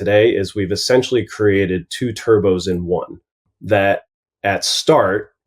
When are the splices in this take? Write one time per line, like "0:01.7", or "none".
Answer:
0:03.4